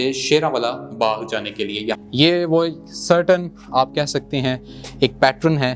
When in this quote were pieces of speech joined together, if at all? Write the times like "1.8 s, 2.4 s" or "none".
2.0 s